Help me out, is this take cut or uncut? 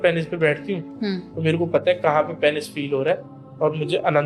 uncut